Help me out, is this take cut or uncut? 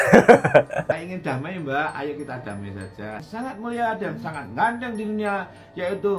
uncut